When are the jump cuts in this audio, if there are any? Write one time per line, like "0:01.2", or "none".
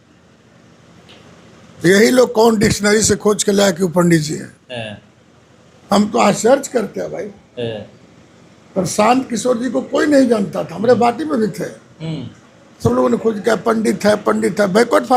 none